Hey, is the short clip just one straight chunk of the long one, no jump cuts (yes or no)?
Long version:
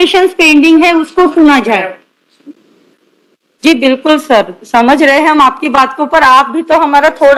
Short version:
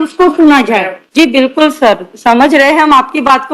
no